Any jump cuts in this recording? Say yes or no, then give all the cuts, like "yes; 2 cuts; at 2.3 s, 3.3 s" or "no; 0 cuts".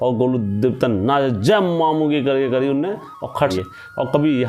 yes; 1 cut; at 3.5 s